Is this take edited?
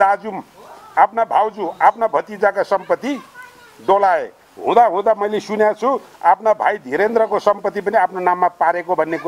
no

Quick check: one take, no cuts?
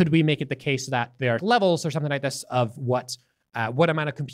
no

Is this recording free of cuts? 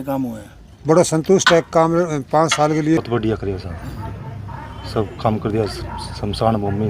no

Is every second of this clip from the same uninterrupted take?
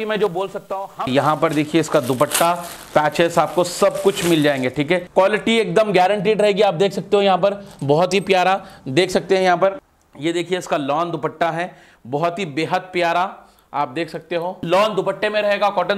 no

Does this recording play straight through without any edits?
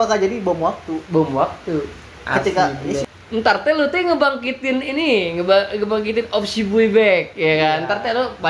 no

